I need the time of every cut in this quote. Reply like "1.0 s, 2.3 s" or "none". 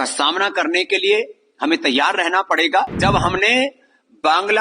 3.0 s